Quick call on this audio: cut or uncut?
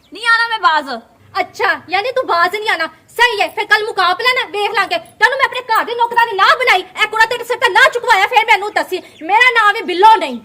cut